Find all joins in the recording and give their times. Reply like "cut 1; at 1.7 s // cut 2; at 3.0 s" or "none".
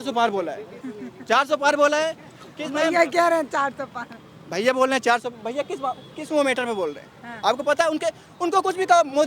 none